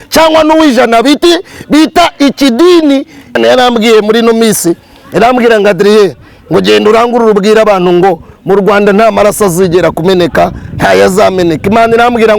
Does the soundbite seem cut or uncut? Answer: cut